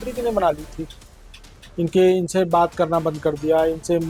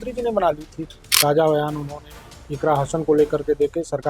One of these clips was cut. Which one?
second; 1 cut; at 1.1 s

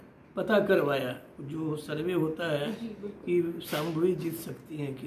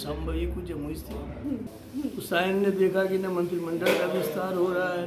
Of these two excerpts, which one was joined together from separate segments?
second; 1 cut; at 1.7 s

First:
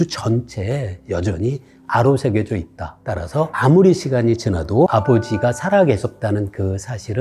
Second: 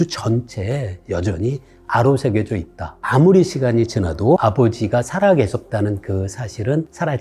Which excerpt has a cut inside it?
second; 1 cut; at 3.0 s

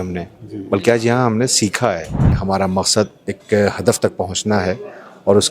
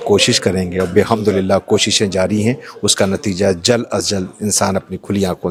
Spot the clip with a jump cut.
first; 1 cut; at 2.4 s

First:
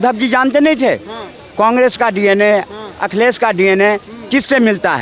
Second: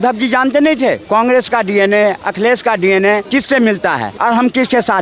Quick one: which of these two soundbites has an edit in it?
second; 4 cuts; at 1.0 s, 2.3 s, 3.3 s, 4.1 s

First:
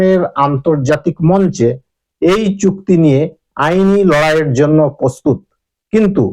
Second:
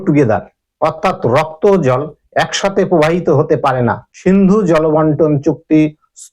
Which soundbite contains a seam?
second; 1 cut; at 4.1 s

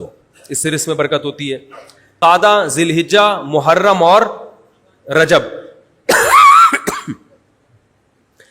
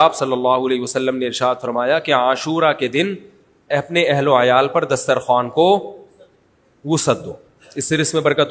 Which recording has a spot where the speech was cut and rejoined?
first; 1 cut; at 2.2 s

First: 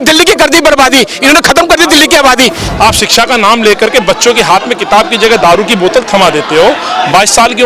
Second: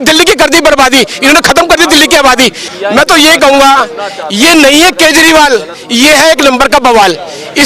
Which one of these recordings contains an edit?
first; 1 cut; at 2.6 s

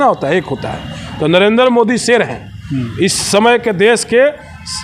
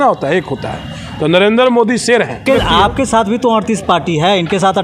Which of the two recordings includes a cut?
second; 1 cut; at 2.4 s

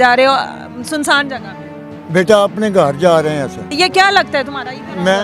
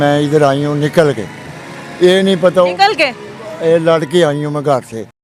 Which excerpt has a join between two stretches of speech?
first; 1 cut; at 3.7 s

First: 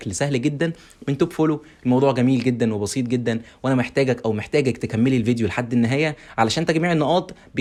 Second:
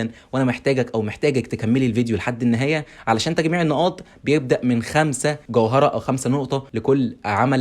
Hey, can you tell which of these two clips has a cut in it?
second; 2 cuts; at 5.4 s, 6.7 s

